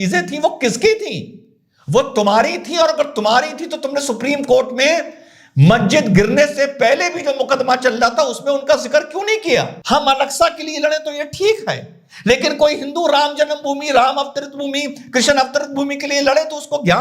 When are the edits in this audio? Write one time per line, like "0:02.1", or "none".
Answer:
0:09.8